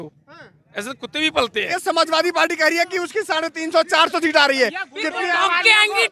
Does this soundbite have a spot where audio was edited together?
yes; 1 cut; at 1.8 s

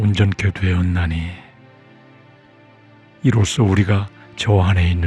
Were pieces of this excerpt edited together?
yes; 2 cuts; at 1.6 s, 3.2 s

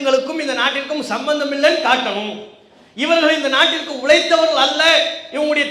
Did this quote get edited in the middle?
no; 0 cuts

